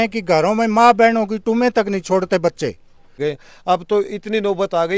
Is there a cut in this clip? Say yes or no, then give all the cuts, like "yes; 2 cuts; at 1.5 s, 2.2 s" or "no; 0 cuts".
yes; 1 cut; at 3.1 s